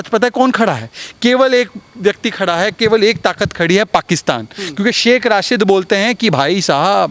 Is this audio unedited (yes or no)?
yes